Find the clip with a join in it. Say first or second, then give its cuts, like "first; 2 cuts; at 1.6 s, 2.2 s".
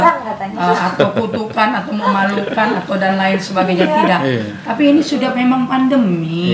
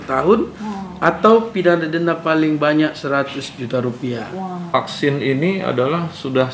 second; 1 cut; at 4.7 s